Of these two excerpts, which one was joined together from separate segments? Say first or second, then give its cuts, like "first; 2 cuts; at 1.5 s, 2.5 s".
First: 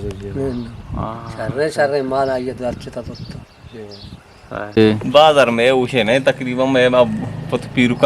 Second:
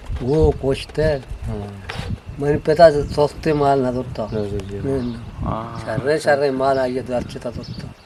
first; 1 cut; at 4.8 s